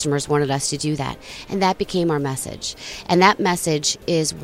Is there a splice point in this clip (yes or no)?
no